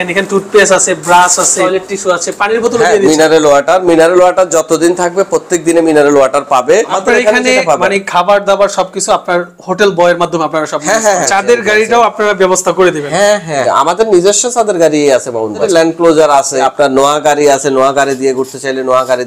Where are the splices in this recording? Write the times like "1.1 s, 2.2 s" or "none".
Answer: 1.6 s, 6.9 s, 11.3 s, 13.6 s, 15.6 s, 16.7 s